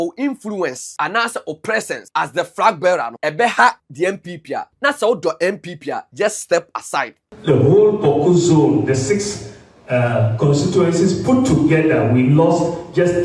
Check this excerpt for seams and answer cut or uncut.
cut